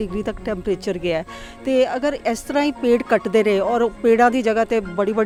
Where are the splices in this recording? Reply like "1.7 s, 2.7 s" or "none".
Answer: none

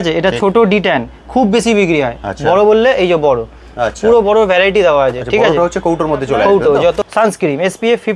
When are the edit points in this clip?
7.0 s

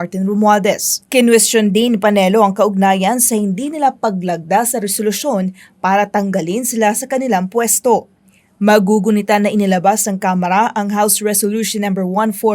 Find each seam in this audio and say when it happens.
0.9 s

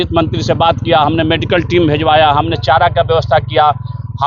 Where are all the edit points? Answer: none

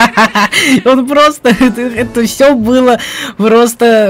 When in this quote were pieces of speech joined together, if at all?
none

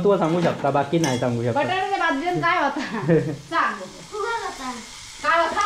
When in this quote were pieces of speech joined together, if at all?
none

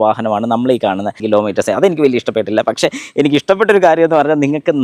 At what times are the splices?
1.2 s

